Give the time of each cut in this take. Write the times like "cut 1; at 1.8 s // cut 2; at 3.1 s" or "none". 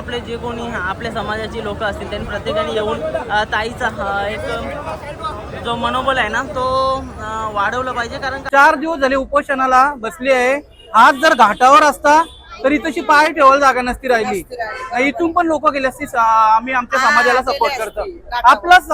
cut 1; at 8.3 s

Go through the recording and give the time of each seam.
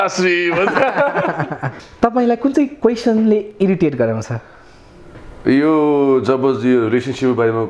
cut 1; at 1.7 s

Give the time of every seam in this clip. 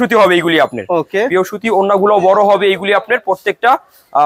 none

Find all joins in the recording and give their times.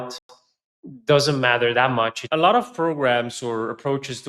cut 1; at 2.2 s

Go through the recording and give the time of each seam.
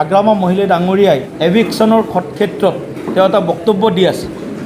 cut 1; at 1.3 s

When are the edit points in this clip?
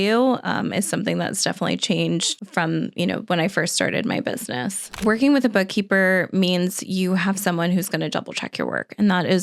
cut 1; at 2.4 s // cut 2; at 5.0 s

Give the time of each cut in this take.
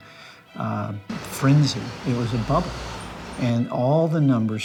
none

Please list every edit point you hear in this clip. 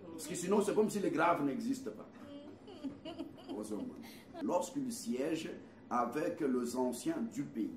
cut 1; at 4.3 s

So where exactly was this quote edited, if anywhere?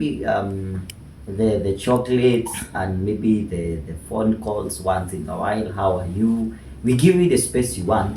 none

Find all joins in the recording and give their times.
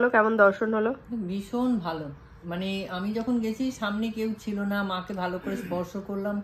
none

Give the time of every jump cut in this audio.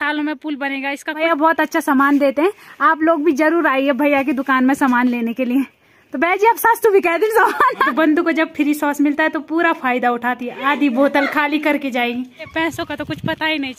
cut 1; at 1.2 s // cut 2; at 7.9 s // cut 3; at 12.5 s

